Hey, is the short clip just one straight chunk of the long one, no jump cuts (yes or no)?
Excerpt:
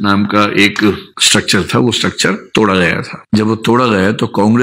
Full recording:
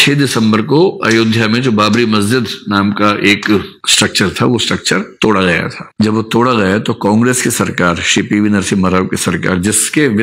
yes